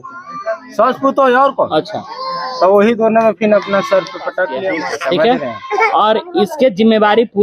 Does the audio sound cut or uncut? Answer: cut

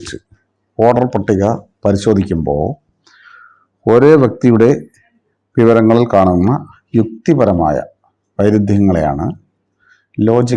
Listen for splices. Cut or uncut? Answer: uncut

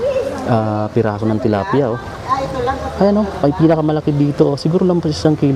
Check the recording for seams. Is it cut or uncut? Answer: uncut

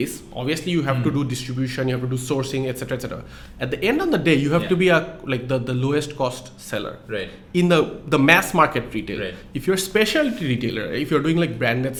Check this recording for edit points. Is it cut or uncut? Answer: uncut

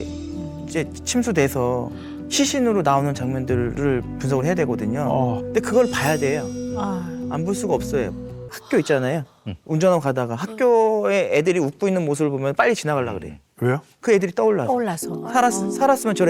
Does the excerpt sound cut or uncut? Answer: cut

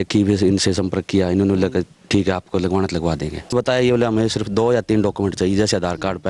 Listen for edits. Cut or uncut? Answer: cut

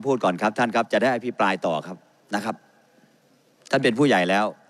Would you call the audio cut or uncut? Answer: uncut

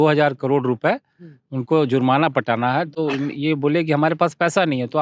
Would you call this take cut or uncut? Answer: uncut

